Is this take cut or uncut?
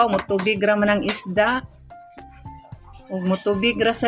cut